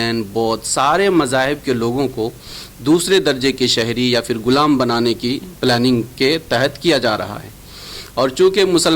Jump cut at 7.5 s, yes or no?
no